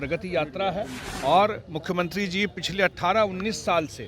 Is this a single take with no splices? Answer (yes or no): no